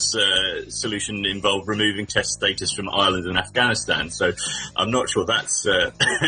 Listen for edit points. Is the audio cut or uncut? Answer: uncut